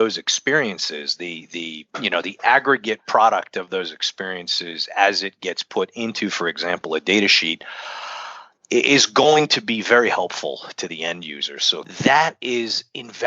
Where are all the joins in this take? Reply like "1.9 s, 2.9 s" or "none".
11.9 s